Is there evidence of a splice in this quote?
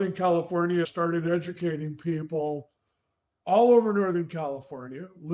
yes; 1 cut; at 0.9 s

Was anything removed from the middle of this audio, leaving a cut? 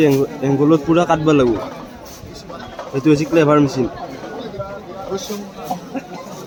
no; 0 cuts

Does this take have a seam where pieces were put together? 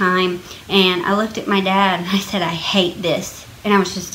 no; 0 cuts

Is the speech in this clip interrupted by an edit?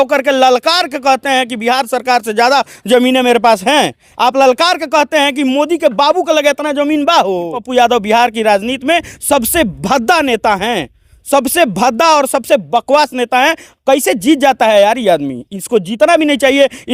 yes; 1 cut; at 7.6 s

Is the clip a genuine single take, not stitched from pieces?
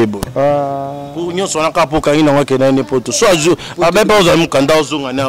yes; 0 cuts

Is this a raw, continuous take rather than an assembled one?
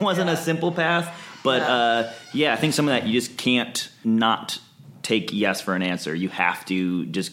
no; 1 cut; at 3.9 s

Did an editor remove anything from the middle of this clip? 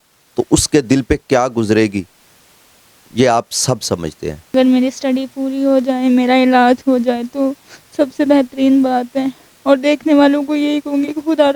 yes; 1 cut; at 4.5 s

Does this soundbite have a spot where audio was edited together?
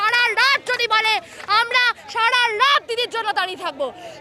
no; 0 cuts

